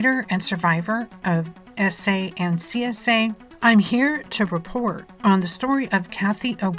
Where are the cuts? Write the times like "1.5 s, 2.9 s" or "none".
none